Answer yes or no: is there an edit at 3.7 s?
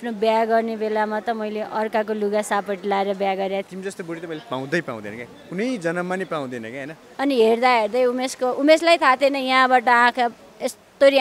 yes